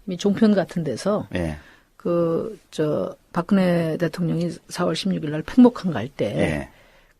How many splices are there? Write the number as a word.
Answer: one